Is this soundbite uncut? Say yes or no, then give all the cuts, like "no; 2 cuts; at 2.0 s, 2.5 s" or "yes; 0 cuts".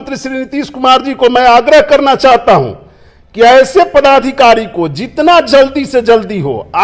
yes; 0 cuts